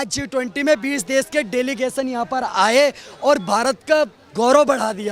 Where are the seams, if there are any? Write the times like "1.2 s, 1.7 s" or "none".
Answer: none